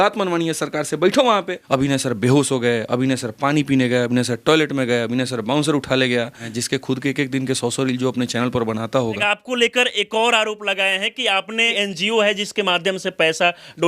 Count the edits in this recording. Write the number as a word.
four